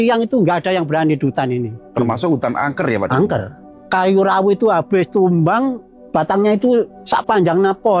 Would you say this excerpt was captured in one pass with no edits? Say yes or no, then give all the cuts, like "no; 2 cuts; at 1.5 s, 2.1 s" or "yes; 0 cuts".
no; 3 cuts; at 3.7 s, 6.0 s, 7.0 s